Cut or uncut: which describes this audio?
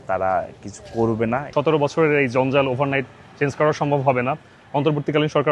cut